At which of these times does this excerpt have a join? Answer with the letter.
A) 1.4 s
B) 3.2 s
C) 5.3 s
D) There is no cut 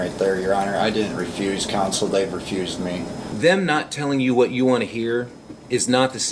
B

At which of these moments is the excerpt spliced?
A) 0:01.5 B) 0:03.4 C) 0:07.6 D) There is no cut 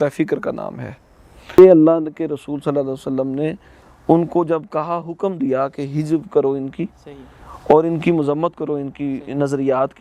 A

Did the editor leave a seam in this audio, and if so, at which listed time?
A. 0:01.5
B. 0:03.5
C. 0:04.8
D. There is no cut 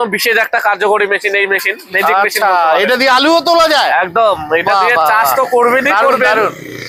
D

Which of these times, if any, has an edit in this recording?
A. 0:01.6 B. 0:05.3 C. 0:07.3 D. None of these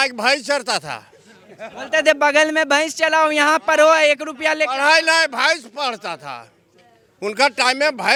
D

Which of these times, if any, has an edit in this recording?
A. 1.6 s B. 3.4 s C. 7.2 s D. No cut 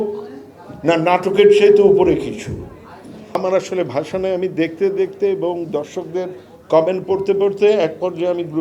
B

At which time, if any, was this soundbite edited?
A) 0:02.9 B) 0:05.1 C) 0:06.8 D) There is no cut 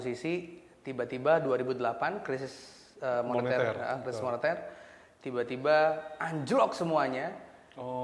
D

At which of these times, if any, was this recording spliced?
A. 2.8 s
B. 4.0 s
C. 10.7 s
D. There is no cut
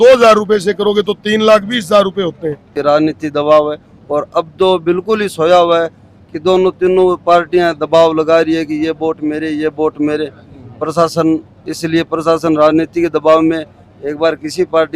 A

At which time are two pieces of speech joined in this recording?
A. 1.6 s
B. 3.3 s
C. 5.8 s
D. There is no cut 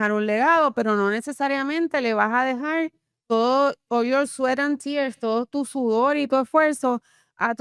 D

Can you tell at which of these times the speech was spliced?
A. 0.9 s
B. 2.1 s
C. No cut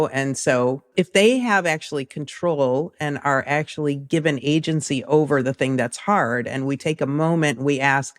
A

